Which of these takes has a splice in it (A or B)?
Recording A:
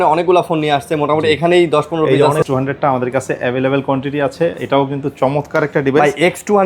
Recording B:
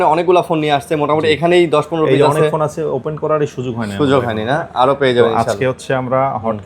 A